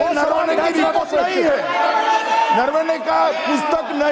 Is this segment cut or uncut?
uncut